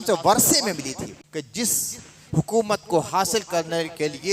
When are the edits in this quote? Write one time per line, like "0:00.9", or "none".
0:01.1